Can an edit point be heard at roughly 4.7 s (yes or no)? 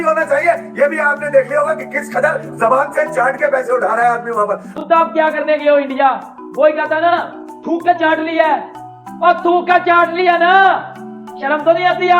yes